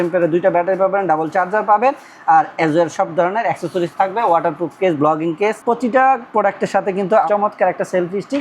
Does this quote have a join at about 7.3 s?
yes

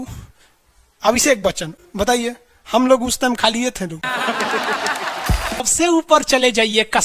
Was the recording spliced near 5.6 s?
yes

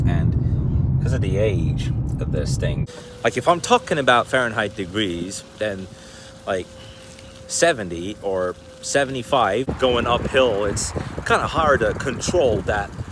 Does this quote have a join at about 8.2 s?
no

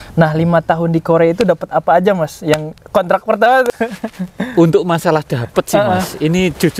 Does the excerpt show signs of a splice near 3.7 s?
yes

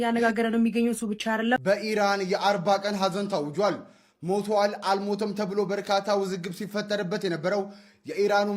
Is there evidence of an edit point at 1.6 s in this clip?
yes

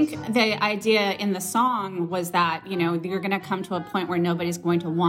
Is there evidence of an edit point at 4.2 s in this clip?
no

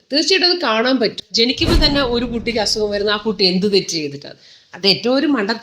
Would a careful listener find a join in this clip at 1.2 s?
yes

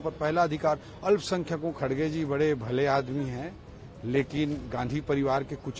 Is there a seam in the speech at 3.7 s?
no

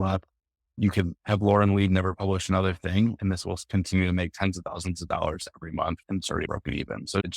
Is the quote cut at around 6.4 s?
yes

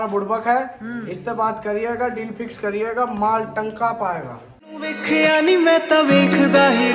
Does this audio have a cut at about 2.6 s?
no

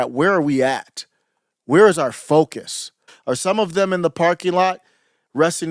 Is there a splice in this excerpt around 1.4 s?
no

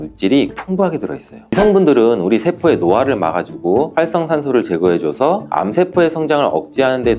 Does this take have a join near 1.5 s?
yes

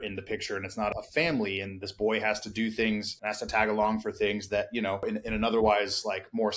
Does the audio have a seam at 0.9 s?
yes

